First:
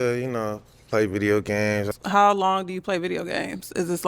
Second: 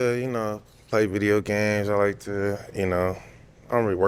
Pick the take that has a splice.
first; 1 cut; at 1.9 s

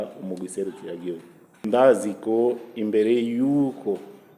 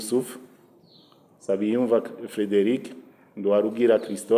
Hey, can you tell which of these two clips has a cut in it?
first; 1 cut; at 1.6 s

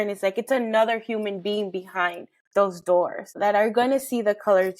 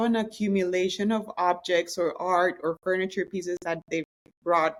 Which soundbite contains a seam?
first; 1 cut; at 3.3 s

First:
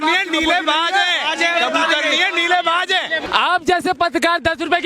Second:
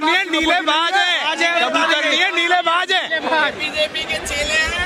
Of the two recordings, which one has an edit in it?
first; 1 cut; at 3.2 s

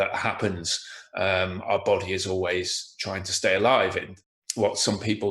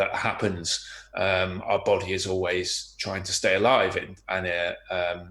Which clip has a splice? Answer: first; 1 cut; at 4.1 s

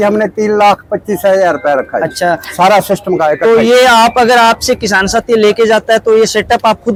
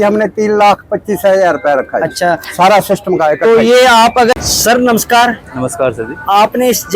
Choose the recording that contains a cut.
second; 1 cut; at 4.3 s

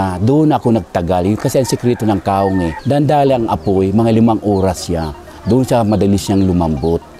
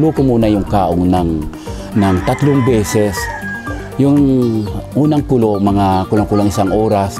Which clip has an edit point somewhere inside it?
first; 1 cut; at 2.8 s

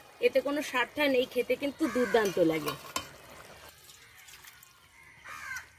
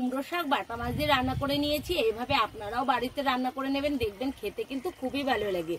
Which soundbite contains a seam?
first; 1 cut; at 3.7 s

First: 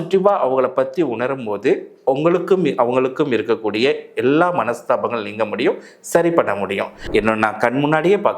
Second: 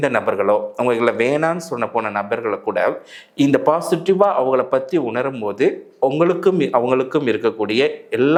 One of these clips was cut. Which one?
first; 1 cut; at 6.9 s

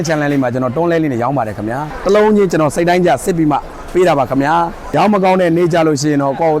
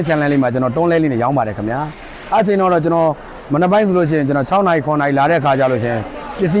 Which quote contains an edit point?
first; 2 cuts; at 1.9 s, 4.8 s

